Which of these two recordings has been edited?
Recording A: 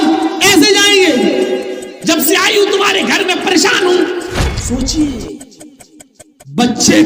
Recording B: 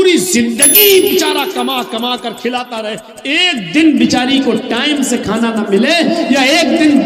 A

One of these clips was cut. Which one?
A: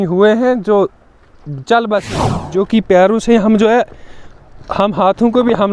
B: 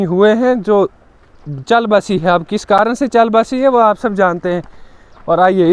A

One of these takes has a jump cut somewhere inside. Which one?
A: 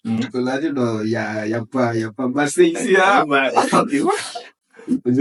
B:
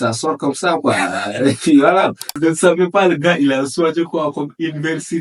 B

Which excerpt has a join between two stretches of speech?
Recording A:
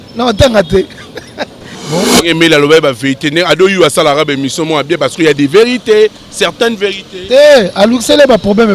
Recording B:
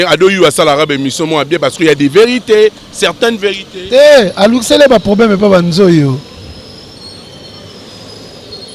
A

